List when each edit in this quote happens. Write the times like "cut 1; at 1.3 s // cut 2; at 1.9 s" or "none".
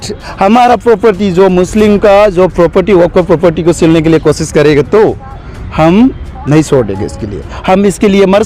none